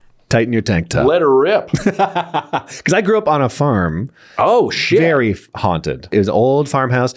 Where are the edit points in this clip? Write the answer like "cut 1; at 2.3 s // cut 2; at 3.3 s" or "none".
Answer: cut 1; at 6.1 s